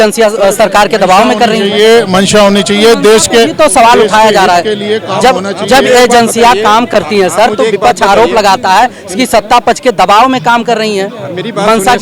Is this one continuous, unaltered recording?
yes; 0 cuts

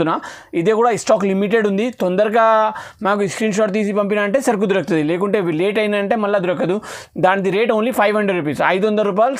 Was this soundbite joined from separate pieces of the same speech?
no; 0 cuts

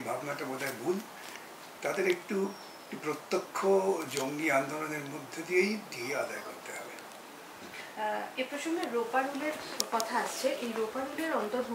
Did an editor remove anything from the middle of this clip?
no; 0 cuts

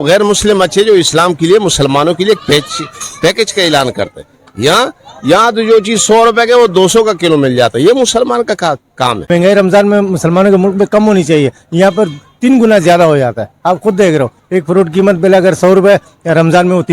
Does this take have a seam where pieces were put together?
yes; 1 cut; at 9.2 s

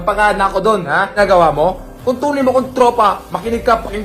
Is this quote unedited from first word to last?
no; 1 cut; at 1.2 s

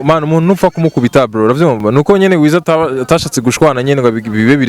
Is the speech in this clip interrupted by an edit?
yes; 1 cut; at 1.8 s

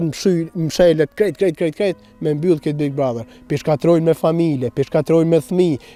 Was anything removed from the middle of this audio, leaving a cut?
no; 0 cuts

